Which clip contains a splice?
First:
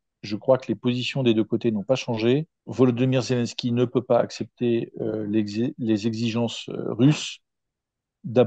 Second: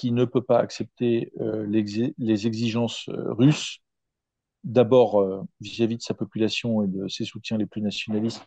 first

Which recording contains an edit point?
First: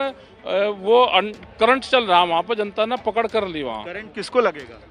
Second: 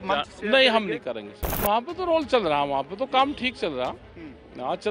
second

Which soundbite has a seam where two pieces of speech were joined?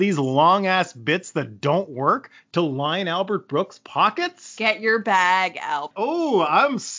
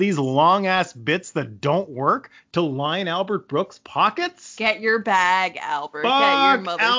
first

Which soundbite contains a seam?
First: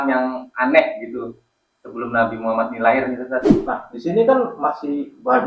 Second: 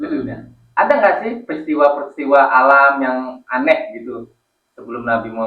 first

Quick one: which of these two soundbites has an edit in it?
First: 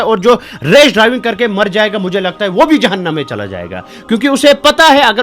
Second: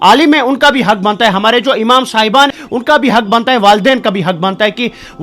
second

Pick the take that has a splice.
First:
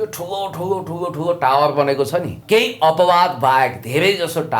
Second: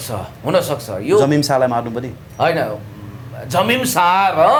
first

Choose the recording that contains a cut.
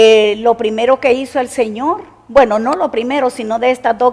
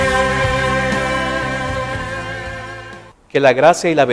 second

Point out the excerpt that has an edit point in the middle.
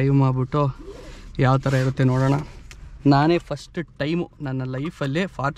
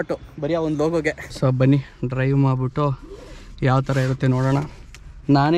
second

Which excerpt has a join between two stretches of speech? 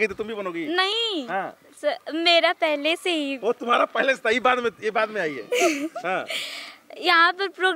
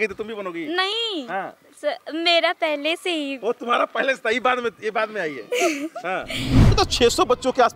second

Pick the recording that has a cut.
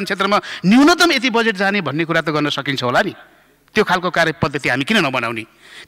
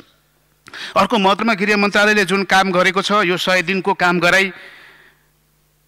second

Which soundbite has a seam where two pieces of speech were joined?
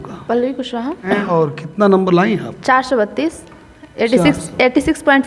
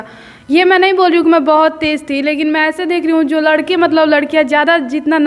first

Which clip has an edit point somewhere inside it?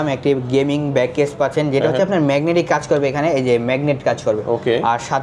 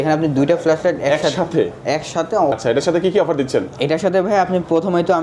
second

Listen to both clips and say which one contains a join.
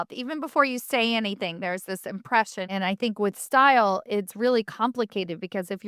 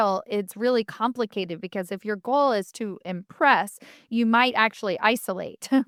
first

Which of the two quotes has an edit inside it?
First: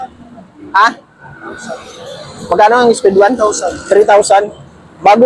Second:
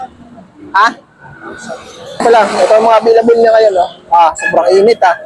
second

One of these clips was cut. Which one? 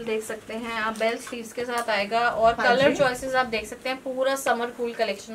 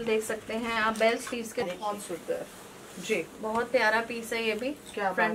second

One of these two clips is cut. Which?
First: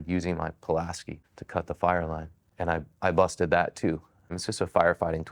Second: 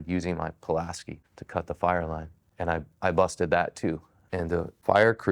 second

